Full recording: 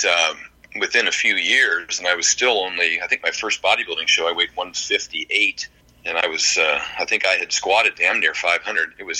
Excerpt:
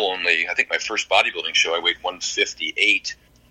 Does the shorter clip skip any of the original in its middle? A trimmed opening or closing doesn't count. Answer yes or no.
no